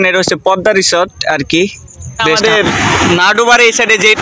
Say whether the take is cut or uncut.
cut